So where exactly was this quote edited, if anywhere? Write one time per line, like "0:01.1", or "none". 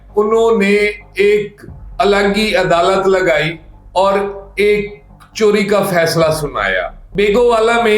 0:06.9